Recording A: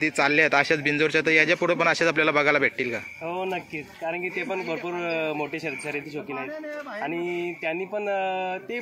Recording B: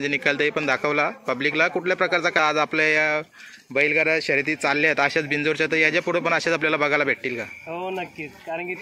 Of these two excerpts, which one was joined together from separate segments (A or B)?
B